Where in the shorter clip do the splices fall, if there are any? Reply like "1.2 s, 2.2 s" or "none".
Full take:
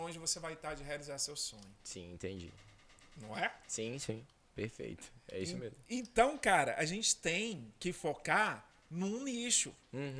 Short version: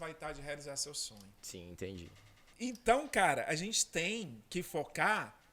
2.5 s